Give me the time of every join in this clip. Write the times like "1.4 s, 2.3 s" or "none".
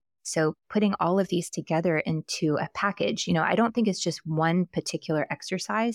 none